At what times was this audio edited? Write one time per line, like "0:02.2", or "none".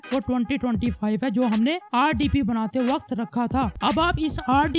0:03.8